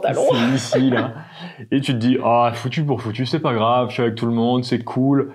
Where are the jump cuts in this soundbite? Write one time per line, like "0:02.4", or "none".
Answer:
none